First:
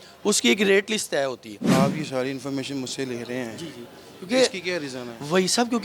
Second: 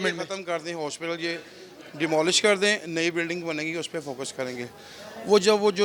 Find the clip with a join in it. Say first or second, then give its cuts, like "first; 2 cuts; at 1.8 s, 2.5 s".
first; 1 cut; at 1.6 s